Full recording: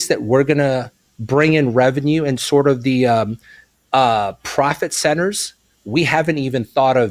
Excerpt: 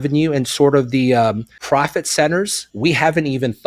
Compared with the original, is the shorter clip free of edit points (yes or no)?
no